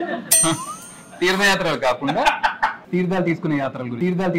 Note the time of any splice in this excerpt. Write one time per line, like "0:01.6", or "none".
0:02.8